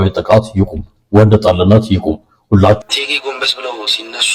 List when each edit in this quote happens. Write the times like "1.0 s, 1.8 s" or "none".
2.8 s